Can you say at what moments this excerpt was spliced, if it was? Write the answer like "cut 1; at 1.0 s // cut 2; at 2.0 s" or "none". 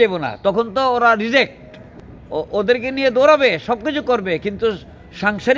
none